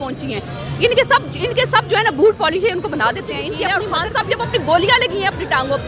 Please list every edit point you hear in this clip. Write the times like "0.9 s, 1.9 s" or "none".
3.5 s